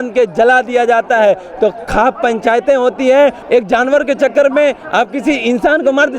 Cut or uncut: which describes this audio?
cut